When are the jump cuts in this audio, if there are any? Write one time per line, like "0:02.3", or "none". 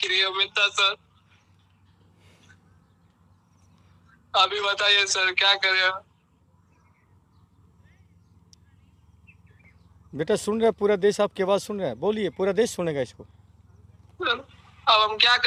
none